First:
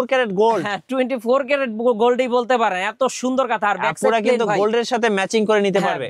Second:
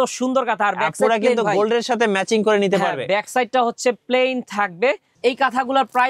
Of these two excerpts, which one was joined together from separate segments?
second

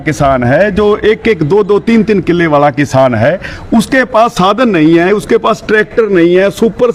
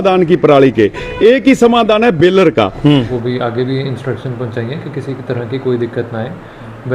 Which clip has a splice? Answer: second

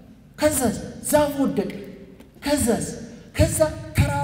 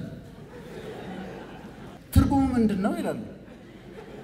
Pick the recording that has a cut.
second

